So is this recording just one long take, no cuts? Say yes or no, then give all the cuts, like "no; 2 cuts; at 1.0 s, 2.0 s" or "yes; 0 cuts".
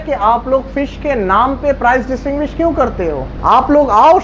no; 1 cut; at 3.3 s